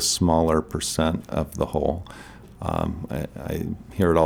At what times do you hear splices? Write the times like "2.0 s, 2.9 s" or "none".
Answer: none